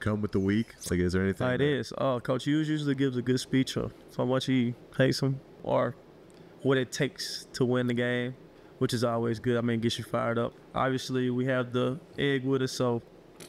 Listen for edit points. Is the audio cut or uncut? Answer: cut